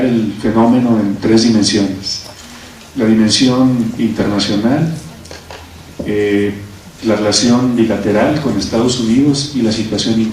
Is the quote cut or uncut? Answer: cut